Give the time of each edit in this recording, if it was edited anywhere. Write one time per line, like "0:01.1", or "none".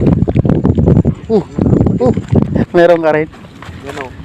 0:02.6